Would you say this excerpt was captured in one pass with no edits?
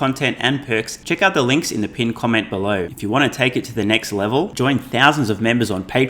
no; 2 cuts; at 0.9 s, 2.9 s

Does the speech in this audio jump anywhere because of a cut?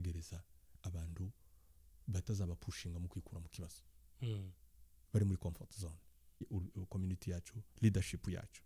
yes; 1 cut; at 6.4 s

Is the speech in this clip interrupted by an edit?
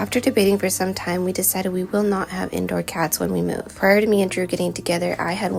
no; 0 cuts

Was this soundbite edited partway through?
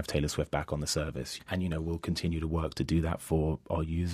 yes; 1 cut; at 1.4 s

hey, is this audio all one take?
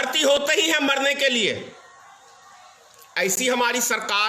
yes; 0 cuts

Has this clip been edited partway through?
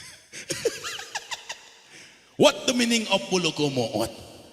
no; 0 cuts

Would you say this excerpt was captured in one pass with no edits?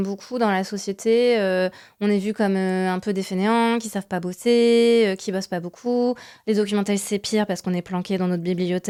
yes; 0 cuts

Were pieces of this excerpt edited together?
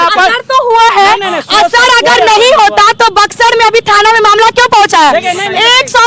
no; 0 cuts

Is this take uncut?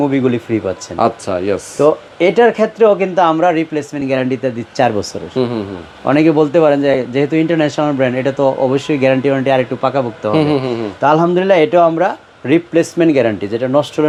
yes; 0 cuts

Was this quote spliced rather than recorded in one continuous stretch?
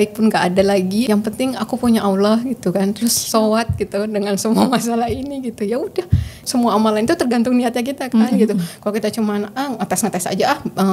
yes; 2 cuts; at 1.0 s, 6.3 s

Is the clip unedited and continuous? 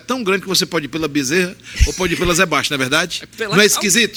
yes; 0 cuts

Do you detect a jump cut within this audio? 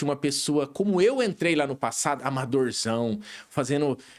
no; 0 cuts

